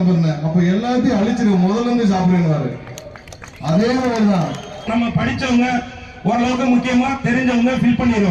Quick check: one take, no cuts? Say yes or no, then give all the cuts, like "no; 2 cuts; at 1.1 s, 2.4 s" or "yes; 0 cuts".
no; 1 cut; at 4.9 s